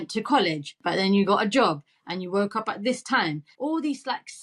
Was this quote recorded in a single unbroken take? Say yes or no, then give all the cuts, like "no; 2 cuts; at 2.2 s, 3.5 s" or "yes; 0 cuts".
no; 2 cuts; at 0.8 s, 3.5 s